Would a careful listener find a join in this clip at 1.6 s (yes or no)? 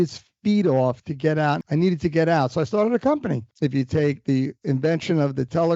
yes